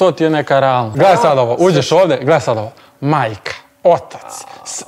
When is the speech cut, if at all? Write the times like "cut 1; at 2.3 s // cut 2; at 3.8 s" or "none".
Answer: cut 1; at 0.9 s